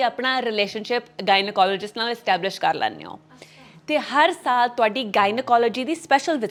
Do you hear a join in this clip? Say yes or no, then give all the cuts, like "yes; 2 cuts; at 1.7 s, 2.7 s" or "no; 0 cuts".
no; 0 cuts